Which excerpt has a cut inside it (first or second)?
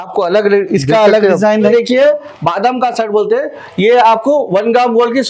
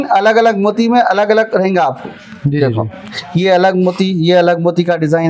first